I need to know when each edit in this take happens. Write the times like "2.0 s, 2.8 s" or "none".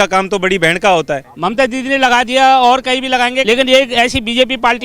1.2 s, 3.4 s